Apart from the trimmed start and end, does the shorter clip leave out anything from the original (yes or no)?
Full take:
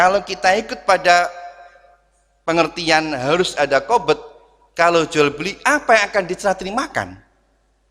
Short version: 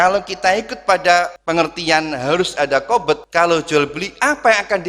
yes